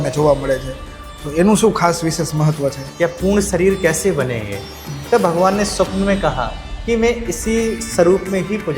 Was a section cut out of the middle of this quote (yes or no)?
yes